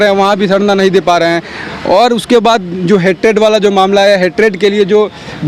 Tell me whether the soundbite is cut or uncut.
uncut